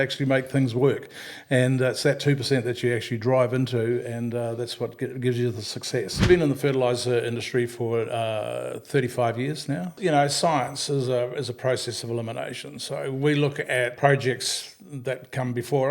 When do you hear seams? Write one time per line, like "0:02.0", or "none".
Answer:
0:06.3
0:09.9
0:13.9